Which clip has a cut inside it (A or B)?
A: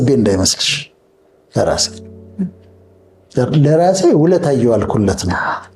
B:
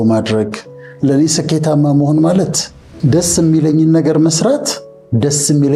B